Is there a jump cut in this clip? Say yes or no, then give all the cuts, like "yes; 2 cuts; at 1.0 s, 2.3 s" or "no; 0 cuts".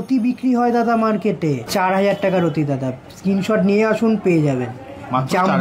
yes; 1 cut; at 1.6 s